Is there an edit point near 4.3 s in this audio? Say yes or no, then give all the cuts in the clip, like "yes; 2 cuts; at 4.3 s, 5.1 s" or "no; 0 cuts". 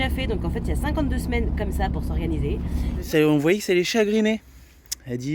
no; 1 cut; at 3.1 s